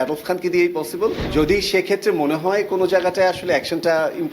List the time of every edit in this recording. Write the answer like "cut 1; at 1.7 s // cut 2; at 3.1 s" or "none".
cut 1; at 1.2 s